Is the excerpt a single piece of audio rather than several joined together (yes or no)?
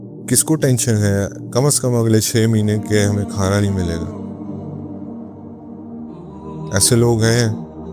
no